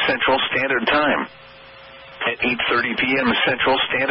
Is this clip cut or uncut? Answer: cut